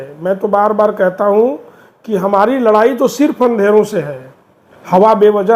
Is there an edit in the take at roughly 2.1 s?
no; 0 cuts

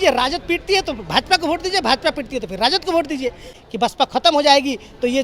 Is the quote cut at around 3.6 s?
yes; 1 cut; at 3.6 s

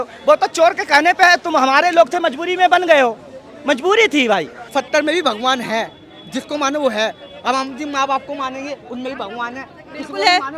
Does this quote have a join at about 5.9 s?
no; 1 cut; at 4.6 s

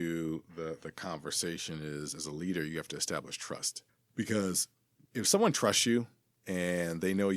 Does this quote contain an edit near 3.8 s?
yes; 2 cuts; at 3.8 s, 5.0 s

